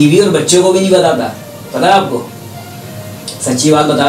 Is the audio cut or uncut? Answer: uncut